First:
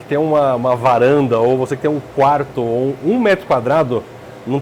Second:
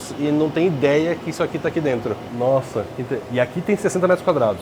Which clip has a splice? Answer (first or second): second